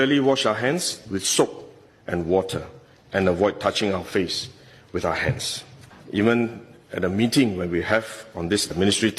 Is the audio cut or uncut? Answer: cut